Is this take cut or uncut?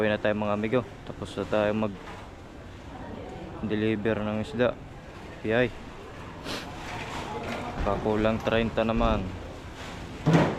uncut